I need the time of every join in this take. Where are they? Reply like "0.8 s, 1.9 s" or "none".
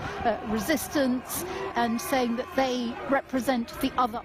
1.7 s